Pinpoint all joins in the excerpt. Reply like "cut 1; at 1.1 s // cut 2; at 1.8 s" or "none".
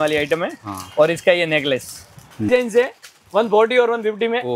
cut 1; at 2.5 s